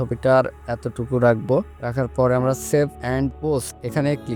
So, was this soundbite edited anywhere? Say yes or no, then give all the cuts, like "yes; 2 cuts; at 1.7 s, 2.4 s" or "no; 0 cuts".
no; 0 cuts